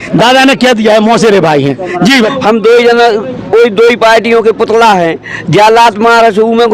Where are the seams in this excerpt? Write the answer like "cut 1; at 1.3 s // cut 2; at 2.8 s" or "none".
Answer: cut 1; at 2.2 s